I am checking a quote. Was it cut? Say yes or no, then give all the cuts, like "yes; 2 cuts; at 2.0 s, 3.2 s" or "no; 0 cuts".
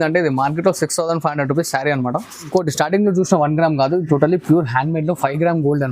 yes; 1 cut; at 2.5 s